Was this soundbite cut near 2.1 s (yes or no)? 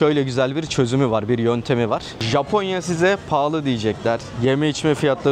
yes